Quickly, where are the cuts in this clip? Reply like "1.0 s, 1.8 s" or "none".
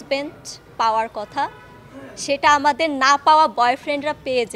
none